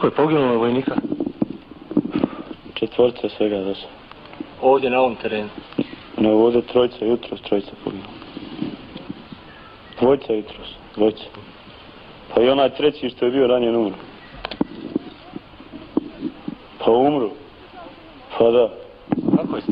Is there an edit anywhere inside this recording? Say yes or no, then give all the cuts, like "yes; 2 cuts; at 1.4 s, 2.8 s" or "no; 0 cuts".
no; 0 cuts